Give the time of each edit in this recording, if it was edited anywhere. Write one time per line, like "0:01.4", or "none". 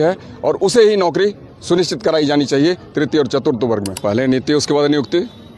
0:03.9